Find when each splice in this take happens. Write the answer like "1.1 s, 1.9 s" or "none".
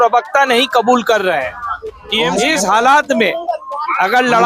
2.0 s